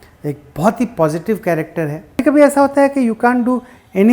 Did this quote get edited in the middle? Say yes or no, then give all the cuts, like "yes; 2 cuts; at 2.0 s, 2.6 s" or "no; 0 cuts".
yes; 1 cut; at 2.2 s